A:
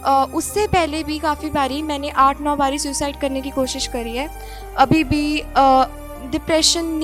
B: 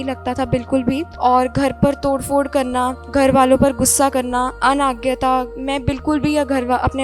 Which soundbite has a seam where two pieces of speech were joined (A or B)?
B